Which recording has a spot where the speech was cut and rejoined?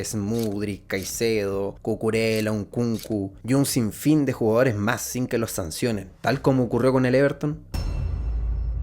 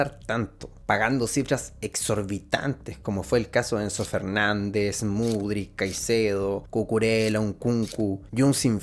first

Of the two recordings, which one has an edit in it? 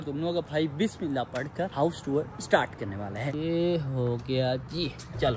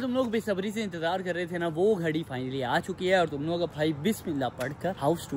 first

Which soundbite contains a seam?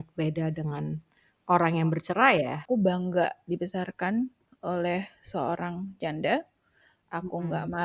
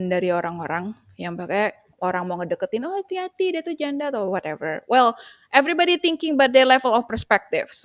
first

